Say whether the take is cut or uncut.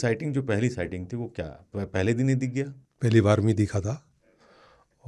cut